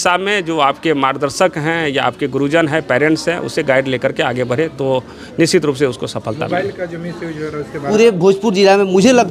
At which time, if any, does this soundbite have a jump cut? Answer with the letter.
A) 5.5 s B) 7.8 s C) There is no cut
B